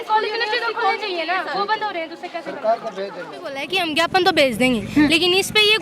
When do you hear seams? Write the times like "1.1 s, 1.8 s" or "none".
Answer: 3.7 s